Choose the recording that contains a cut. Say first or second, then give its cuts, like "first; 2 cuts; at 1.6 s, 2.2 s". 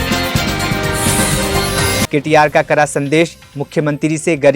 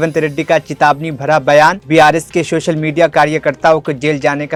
first; 1 cut; at 2.1 s